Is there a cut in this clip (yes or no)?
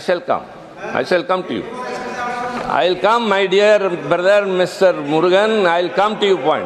no